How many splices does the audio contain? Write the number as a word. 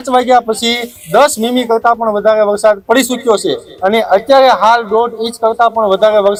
zero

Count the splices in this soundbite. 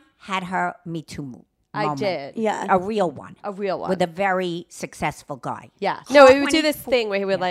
one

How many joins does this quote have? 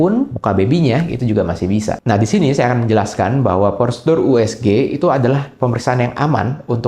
one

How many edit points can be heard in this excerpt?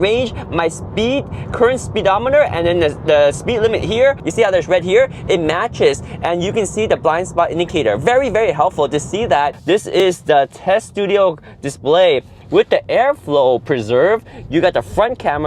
two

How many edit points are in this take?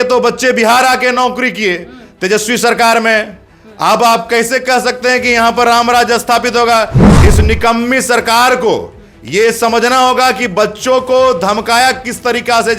one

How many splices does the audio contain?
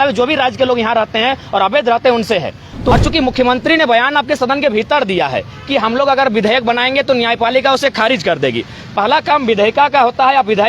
one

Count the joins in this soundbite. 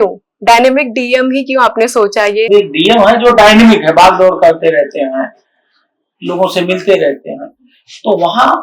one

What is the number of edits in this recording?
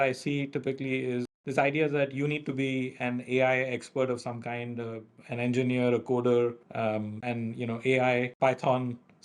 three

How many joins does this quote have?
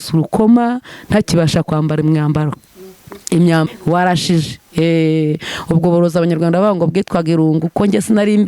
one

